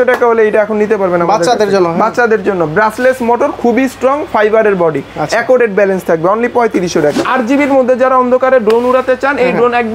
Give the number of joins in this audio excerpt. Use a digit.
1